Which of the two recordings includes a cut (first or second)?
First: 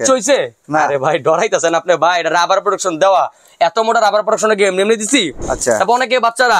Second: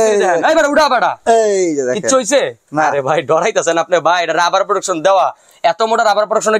first